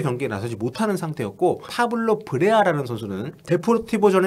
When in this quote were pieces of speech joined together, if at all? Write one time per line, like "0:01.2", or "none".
0:01.7
0:03.3